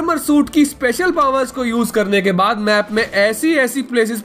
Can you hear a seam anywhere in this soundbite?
no; 0 cuts

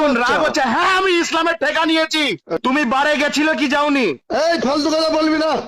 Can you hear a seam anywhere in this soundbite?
yes; 1 cut; at 2.6 s

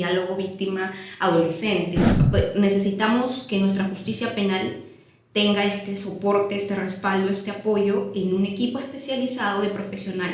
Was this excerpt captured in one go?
no; 1 cut; at 2.1 s

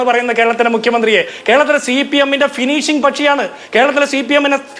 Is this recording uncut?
no; 1 cut; at 1.4 s

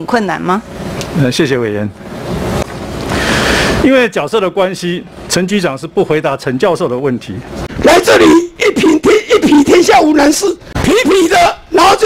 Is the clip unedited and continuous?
no; 3 cuts; at 2.6 s, 7.6 s, 10.7 s

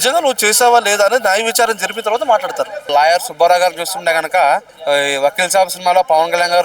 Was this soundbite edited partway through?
yes; 2 cuts; at 2.9 s, 4.7 s

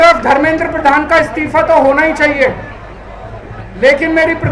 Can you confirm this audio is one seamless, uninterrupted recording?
yes; 0 cuts

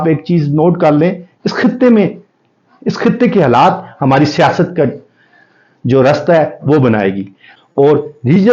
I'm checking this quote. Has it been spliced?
yes; 1 cut; at 7.4 s

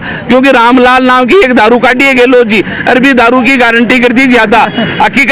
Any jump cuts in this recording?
no; 0 cuts

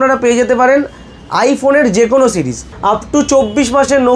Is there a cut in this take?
yes; 1 cut; at 2.6 s

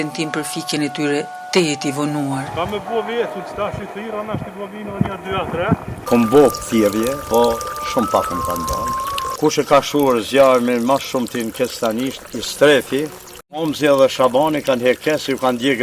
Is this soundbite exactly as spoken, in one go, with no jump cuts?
no; 1 cut; at 5.9 s

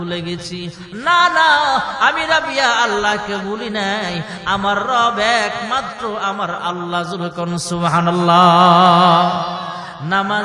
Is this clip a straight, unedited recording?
yes; 0 cuts

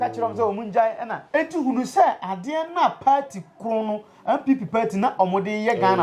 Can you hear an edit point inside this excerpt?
yes; 1 cut; at 1.1 s

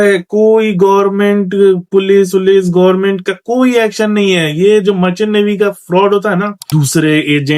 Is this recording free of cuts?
no; 1 cut; at 6.6 s

